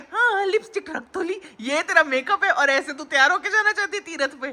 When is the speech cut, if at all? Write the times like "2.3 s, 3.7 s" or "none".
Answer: none